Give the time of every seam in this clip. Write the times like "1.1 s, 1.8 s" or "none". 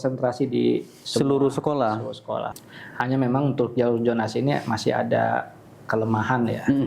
2.6 s